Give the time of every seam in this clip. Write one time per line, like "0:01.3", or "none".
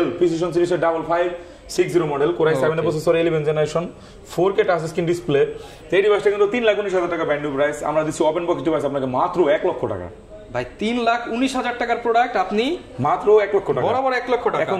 none